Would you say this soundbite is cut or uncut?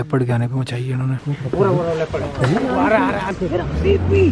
cut